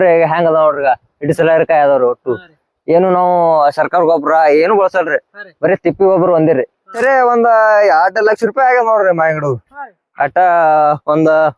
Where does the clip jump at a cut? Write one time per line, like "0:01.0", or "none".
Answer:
0:07.0

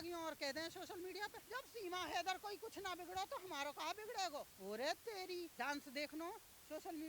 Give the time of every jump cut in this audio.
0:01.4
0:04.5
0:05.5

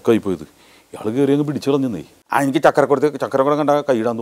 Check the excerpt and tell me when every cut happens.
0:02.1

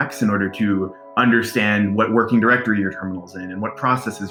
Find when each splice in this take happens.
none

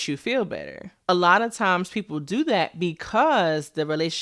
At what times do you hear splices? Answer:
0:01.1

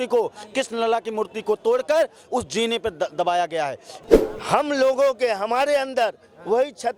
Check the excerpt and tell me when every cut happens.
0:03.9

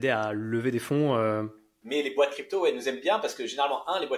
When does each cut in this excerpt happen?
0:01.7

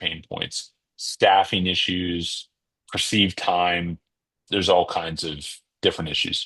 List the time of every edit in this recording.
0:04.4

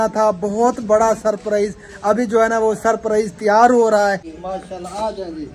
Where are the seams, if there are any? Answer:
0:04.3

